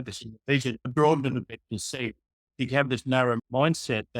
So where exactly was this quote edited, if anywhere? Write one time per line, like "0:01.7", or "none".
0:00.9
0:03.4